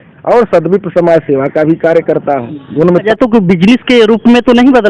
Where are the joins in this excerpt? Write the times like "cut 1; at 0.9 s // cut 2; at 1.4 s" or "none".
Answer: cut 1; at 3.1 s